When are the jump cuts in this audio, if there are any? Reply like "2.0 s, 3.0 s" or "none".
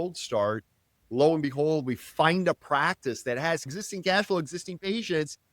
3.8 s

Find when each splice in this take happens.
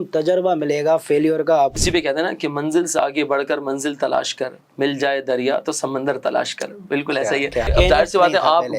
1.8 s, 7.7 s

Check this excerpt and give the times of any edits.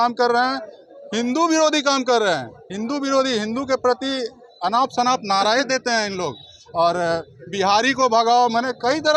none

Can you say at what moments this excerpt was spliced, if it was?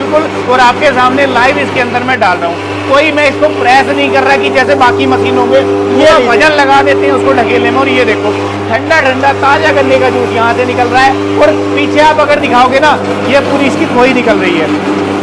none

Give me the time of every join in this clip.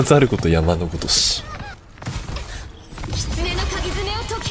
1.7 s

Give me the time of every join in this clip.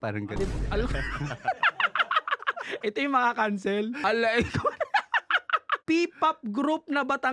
4.0 s, 5.8 s

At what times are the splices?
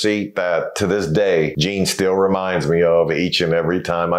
1.6 s

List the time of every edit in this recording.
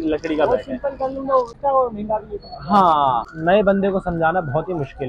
1.5 s, 3.3 s

